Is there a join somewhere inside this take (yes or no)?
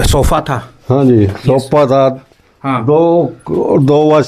no